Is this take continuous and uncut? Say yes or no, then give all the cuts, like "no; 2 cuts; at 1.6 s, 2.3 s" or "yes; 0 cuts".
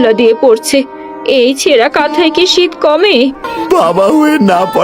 no; 1 cut; at 3.4 s